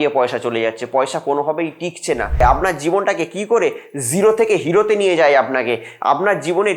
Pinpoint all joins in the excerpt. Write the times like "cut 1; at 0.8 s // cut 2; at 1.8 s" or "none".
cut 1; at 2.4 s